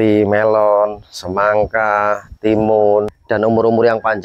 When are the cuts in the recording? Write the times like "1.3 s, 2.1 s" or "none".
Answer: 3.1 s